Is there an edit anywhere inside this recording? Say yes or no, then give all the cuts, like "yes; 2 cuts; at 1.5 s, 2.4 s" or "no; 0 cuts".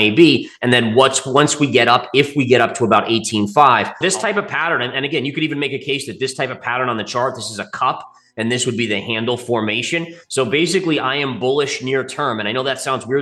yes; 1 cut; at 4.0 s